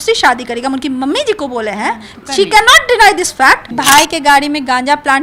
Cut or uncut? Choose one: cut